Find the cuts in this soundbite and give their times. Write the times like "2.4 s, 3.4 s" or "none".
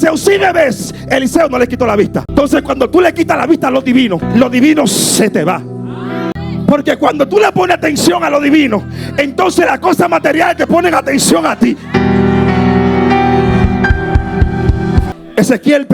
2.3 s, 4.2 s, 6.3 s, 15.1 s